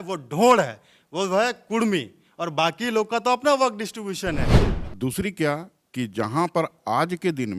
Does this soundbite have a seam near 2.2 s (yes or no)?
no